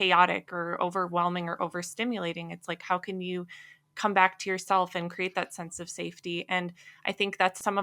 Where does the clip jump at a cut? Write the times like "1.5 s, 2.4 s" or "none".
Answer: none